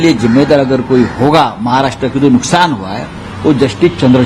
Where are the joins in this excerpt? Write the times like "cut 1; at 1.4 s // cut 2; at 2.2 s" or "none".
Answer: none